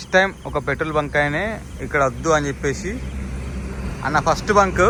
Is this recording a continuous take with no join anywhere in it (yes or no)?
yes